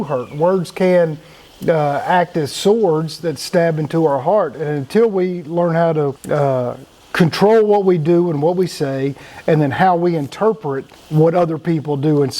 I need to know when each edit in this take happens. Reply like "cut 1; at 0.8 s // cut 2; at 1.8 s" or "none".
none